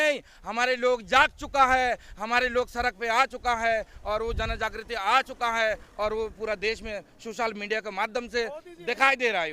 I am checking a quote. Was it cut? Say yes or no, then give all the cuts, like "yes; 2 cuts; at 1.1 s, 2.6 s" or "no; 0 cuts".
no; 0 cuts